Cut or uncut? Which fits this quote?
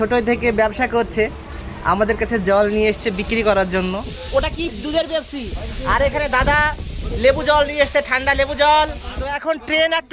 cut